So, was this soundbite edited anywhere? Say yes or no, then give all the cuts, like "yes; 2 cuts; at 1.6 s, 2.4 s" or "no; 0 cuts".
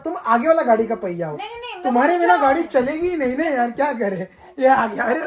no; 0 cuts